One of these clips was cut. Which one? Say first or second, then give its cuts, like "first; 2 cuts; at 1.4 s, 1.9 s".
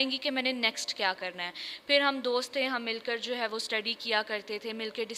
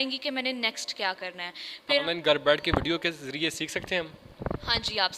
second; 1 cut; at 2.0 s